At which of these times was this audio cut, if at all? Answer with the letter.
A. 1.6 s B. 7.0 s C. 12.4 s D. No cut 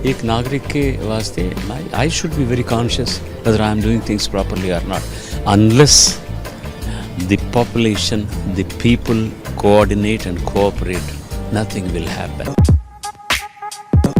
C